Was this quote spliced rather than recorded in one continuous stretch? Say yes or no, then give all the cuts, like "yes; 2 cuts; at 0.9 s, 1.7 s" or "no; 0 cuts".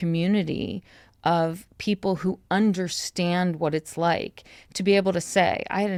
no; 0 cuts